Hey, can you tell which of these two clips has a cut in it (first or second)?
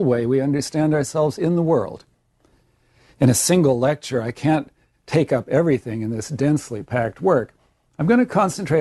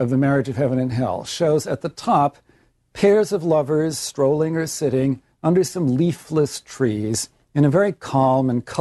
first